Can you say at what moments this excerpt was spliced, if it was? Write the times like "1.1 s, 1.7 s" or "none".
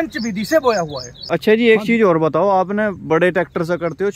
1.3 s